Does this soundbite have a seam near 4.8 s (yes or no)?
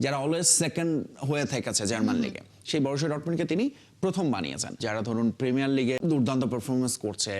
yes